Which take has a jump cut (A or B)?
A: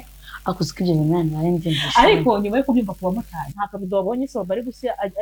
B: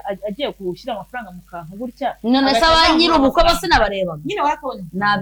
A